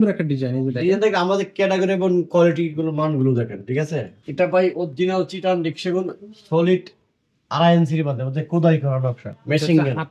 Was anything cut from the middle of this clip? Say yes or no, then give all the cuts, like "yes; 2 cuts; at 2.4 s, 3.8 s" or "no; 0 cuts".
yes; 1 cut; at 4.2 s